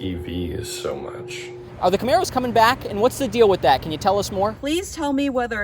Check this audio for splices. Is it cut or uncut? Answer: cut